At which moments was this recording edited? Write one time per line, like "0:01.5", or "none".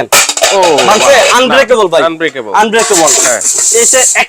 none